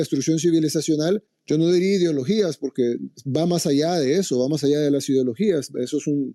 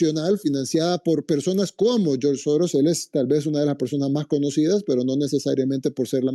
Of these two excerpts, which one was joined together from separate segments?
first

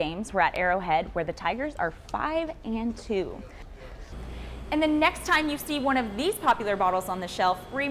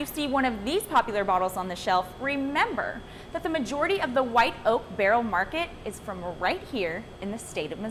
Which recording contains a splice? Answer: first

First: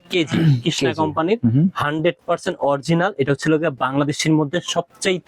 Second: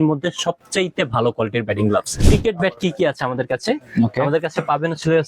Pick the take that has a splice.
second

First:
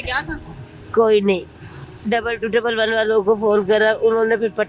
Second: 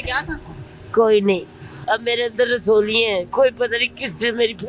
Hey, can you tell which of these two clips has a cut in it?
second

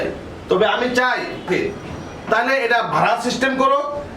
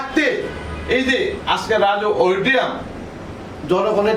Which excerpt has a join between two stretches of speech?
first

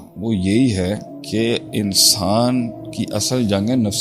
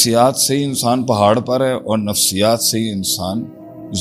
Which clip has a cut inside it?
first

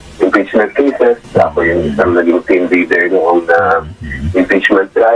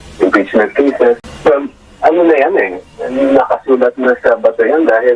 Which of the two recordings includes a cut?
second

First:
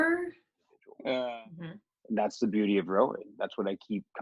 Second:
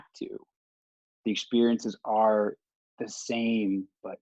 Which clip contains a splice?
first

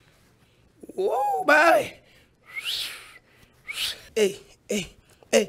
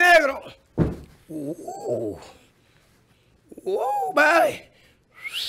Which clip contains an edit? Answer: first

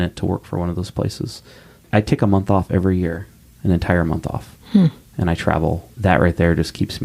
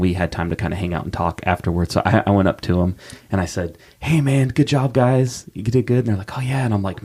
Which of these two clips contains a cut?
first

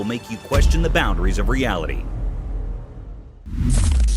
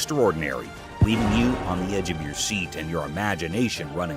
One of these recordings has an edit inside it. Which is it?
first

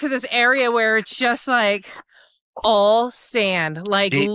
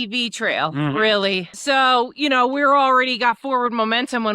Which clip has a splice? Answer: second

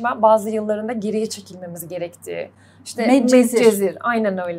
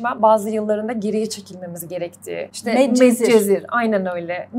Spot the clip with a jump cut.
second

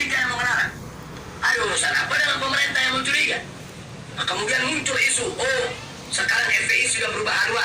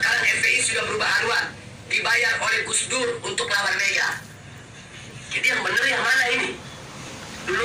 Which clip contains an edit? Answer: first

